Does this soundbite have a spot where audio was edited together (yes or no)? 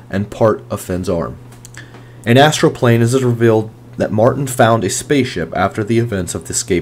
no